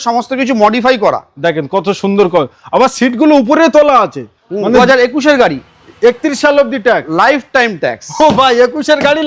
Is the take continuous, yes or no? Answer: no